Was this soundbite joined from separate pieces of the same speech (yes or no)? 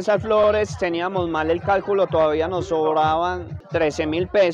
no